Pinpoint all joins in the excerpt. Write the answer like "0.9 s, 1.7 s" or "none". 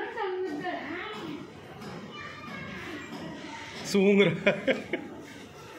none